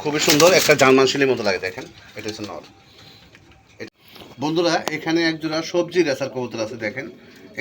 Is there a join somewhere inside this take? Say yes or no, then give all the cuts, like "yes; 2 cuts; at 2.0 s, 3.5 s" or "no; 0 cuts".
yes; 1 cut; at 3.9 s